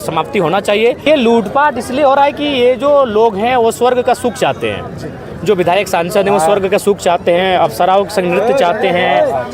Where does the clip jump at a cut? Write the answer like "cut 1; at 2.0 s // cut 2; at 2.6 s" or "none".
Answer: cut 1; at 1.0 s